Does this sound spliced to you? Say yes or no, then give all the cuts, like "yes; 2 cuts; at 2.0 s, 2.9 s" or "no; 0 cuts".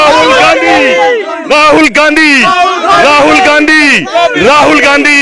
no; 0 cuts